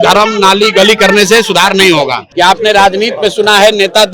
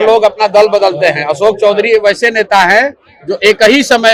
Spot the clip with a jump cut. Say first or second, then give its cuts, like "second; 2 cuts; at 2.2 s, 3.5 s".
first; 1 cut; at 2.2 s